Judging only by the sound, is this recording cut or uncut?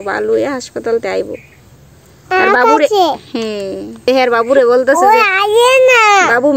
cut